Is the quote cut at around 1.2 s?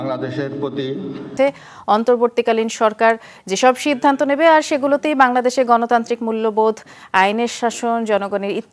yes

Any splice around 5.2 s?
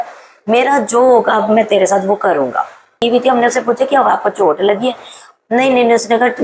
no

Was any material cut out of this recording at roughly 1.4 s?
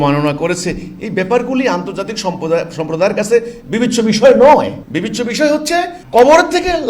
no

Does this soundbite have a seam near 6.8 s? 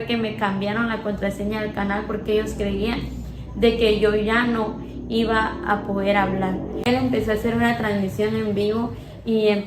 yes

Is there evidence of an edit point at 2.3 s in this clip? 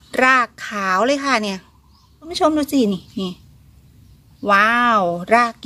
yes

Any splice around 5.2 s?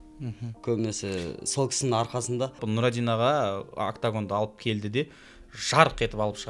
no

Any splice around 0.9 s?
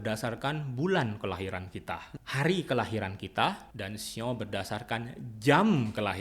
no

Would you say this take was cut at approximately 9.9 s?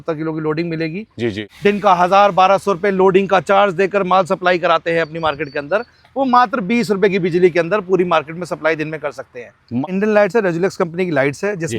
yes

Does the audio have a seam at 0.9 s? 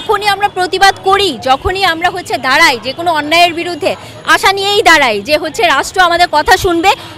no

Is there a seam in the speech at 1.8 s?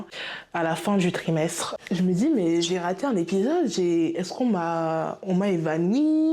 yes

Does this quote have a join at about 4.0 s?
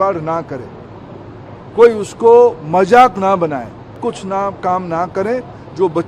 yes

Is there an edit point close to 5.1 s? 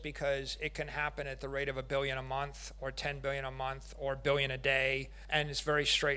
yes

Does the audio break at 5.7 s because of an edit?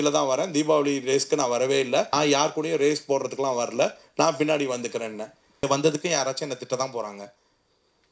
yes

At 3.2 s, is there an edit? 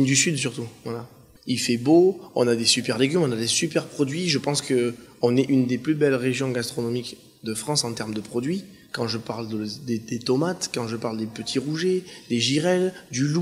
yes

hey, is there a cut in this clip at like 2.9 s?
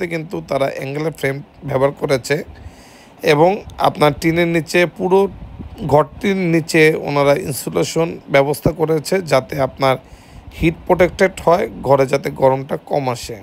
no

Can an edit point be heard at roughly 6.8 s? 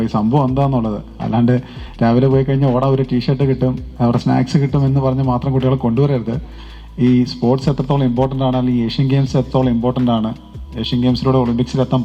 no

